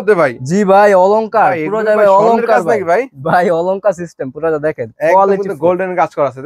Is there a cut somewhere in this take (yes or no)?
no